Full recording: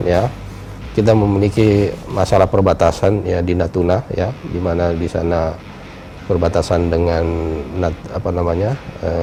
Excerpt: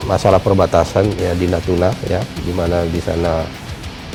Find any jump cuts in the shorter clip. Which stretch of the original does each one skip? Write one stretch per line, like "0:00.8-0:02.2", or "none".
none